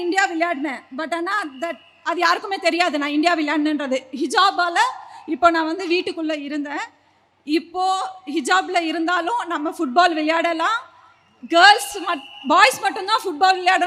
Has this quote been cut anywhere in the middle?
no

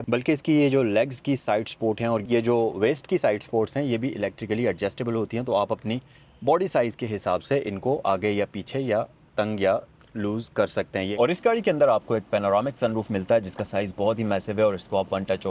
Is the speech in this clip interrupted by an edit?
yes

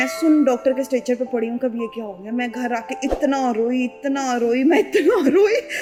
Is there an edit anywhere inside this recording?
no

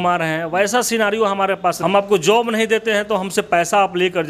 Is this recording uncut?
no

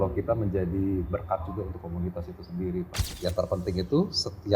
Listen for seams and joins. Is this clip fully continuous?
no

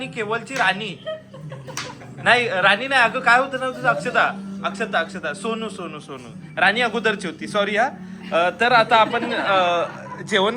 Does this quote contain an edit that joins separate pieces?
no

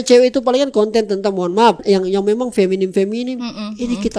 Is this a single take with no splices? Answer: no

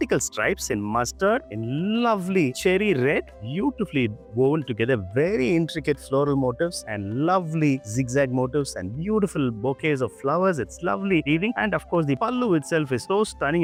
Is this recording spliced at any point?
no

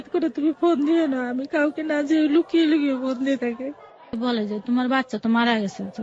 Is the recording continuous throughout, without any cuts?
no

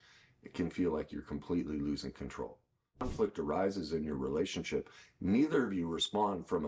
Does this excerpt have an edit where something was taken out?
yes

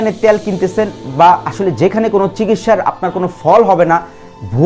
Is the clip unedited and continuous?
yes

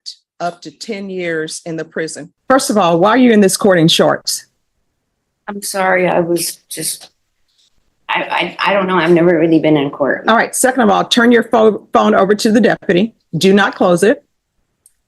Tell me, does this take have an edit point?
yes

